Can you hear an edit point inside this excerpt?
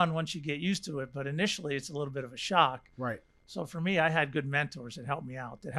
no; 0 cuts

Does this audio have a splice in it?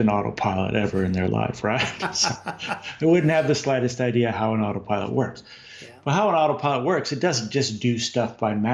no; 0 cuts

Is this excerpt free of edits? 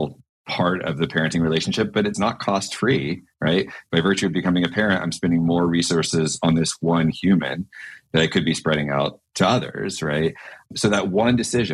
yes; 0 cuts

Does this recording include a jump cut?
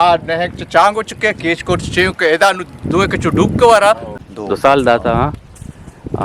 yes; 1 cut; at 4.2 s

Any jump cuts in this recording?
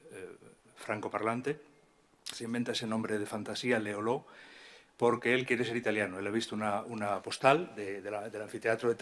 no; 0 cuts

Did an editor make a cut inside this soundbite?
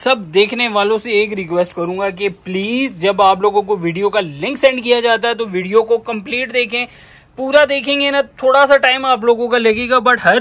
no; 0 cuts

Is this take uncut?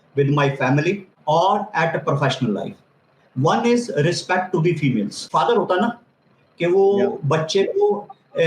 no; 2 cuts; at 1.1 s, 5.3 s

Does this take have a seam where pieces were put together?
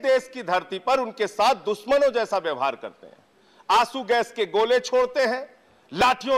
no; 0 cuts

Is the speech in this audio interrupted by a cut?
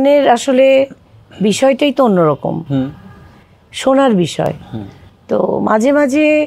no; 0 cuts

